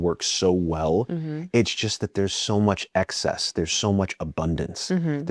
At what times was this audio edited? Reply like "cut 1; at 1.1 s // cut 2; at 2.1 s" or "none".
none

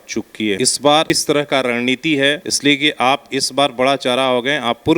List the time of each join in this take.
cut 1; at 0.9 s // cut 2; at 2.5 s

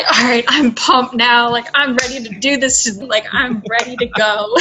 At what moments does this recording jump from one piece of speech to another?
cut 1; at 3.0 s

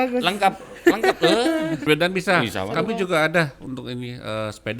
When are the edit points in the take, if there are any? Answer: cut 1; at 1.8 s

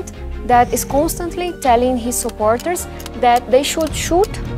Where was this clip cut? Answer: none

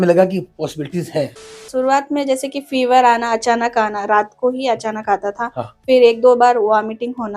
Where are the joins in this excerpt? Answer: cut 1; at 1.6 s

